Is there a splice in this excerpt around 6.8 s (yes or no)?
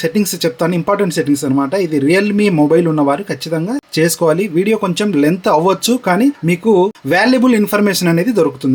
yes